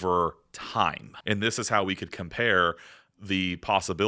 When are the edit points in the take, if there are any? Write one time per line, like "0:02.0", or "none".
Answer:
0:01.1